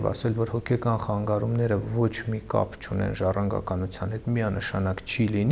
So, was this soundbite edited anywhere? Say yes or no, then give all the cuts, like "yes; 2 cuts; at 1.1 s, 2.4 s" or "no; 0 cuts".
no; 0 cuts